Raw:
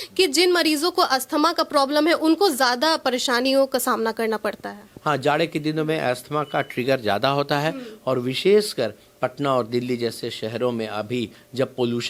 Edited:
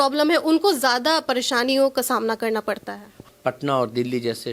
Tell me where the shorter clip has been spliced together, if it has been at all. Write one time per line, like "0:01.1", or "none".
0:03.2